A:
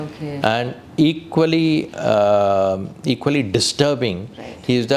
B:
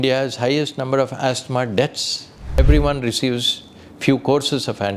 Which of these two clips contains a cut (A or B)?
B